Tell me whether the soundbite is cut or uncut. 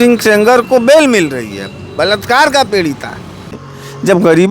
cut